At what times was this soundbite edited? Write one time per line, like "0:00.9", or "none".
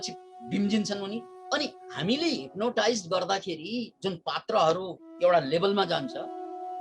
0:01.3